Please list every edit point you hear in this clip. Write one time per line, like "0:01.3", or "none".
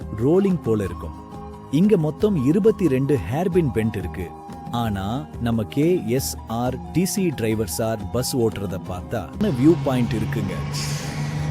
0:09.4